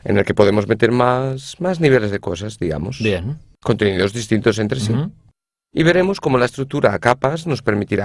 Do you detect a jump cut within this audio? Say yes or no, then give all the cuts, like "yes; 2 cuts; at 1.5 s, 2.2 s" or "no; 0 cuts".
yes; 1 cut; at 1.2 s